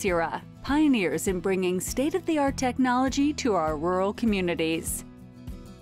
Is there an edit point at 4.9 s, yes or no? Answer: yes